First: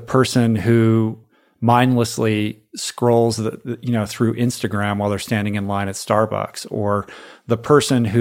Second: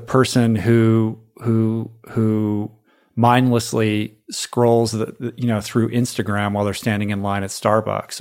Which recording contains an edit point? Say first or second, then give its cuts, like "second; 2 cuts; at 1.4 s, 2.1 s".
first; 1 cut; at 1.3 s